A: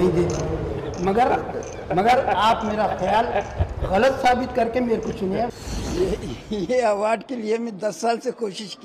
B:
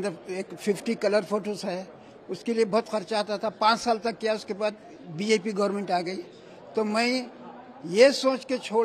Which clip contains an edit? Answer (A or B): A